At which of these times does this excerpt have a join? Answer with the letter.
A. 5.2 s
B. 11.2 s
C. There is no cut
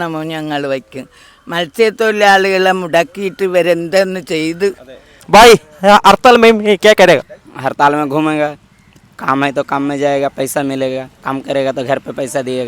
A